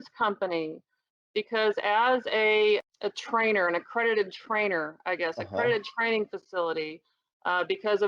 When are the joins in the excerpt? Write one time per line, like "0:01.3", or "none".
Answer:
0:02.8